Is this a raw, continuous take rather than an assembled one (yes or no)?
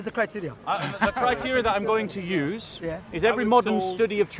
yes